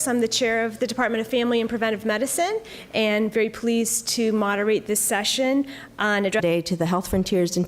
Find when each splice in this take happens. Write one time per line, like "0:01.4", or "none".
none